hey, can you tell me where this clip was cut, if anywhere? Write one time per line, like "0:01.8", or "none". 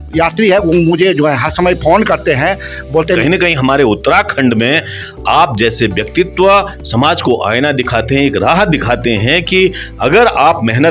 0:03.2